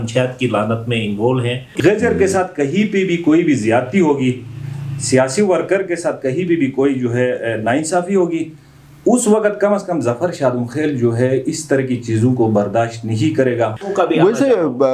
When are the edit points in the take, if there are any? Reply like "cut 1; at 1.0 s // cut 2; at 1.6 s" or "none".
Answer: cut 1; at 1.7 s // cut 2; at 13.8 s